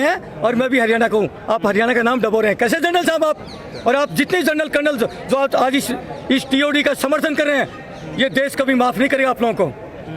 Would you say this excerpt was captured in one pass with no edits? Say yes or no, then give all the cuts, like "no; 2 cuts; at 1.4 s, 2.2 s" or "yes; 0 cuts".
yes; 0 cuts